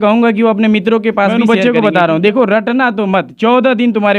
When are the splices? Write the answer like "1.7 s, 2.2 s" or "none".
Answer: 1.4 s